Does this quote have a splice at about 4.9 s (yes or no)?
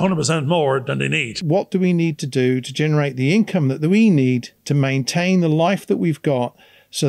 no